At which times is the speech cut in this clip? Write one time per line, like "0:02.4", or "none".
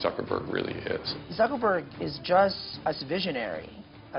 0:01.1
0:02.7